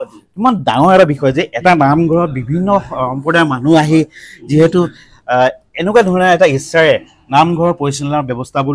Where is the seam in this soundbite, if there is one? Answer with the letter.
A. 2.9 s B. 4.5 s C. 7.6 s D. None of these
D